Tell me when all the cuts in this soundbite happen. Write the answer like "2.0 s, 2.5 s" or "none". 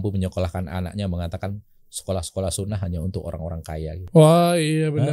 4.0 s